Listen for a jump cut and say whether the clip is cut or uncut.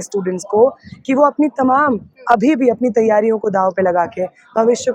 uncut